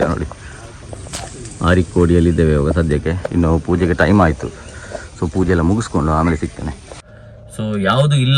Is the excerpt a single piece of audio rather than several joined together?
no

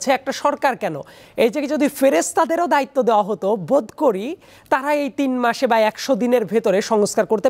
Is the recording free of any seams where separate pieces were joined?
yes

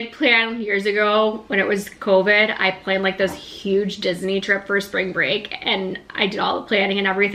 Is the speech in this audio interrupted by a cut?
no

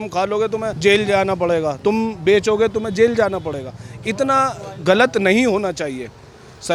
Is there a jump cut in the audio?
no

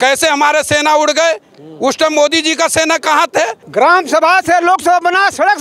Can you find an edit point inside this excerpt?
yes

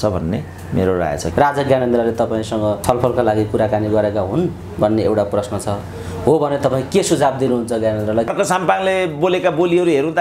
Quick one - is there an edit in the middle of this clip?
yes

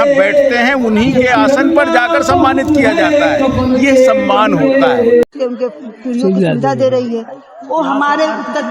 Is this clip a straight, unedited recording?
no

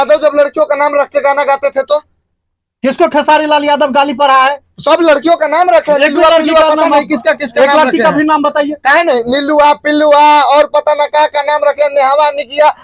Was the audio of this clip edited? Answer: no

